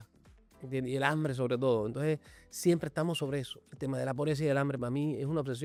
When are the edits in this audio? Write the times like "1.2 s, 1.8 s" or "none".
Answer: none